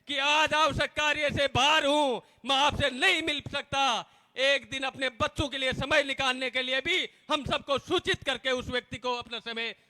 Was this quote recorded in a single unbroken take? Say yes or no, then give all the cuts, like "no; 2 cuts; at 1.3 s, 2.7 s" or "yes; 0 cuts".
yes; 0 cuts